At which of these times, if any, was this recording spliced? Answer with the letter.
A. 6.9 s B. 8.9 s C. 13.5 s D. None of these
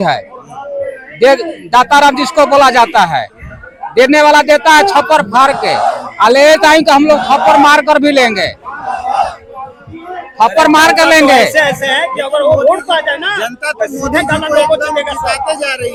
D